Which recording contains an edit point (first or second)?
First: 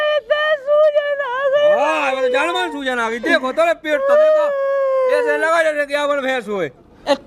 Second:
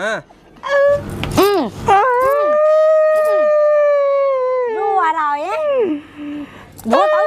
second